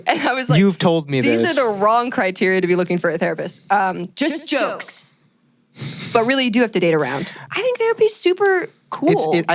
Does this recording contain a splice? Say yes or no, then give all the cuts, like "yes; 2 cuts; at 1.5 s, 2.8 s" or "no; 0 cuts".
no; 0 cuts